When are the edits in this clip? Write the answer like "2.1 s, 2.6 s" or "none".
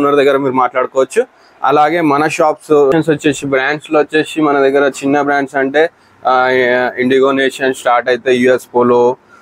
2.9 s